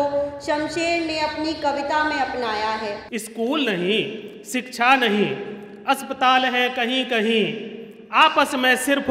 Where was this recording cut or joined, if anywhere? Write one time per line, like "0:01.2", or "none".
0:03.0